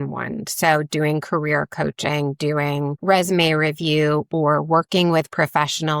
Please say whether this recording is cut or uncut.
uncut